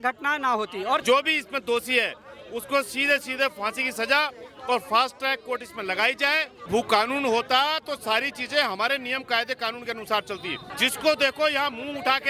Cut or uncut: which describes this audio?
cut